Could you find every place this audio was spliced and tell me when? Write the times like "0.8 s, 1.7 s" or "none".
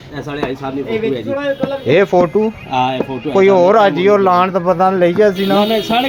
none